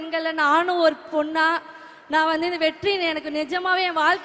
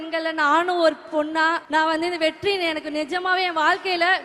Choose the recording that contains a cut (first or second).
second